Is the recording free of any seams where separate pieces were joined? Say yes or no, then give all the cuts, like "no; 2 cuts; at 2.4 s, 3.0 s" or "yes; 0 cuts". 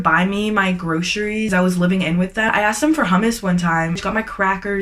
no; 3 cuts; at 1.5 s, 2.5 s, 4.0 s